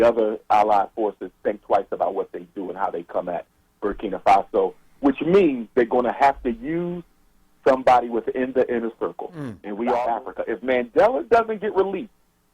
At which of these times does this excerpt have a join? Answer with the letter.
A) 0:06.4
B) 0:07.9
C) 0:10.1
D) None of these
C